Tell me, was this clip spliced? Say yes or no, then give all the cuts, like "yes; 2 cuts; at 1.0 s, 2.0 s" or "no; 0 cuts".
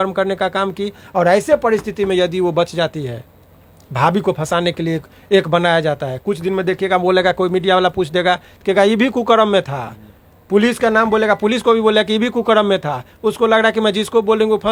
no; 0 cuts